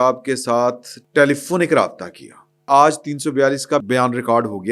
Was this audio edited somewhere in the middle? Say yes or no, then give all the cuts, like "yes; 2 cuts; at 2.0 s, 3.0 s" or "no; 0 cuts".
yes; 3 cuts; at 0.9 s, 2.6 s, 3.8 s